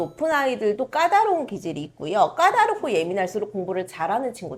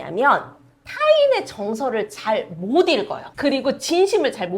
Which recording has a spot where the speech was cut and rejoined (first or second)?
second